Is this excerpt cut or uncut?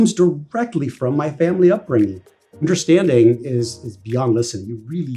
cut